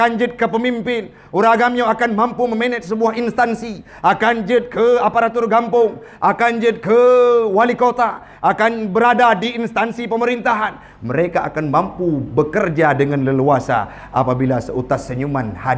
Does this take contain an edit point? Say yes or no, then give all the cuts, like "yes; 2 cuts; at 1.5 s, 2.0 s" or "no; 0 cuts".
no; 0 cuts